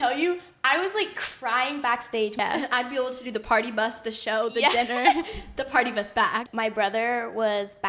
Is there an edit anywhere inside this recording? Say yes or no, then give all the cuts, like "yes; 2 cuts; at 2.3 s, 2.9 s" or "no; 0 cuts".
yes; 2 cuts; at 2.4 s, 6.5 s